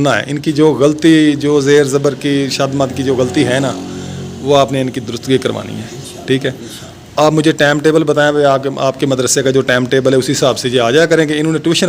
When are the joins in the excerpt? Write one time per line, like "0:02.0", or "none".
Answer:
none